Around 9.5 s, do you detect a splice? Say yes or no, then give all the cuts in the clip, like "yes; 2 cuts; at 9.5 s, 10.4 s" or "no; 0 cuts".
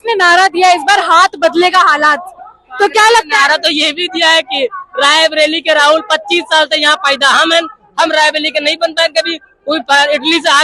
no; 0 cuts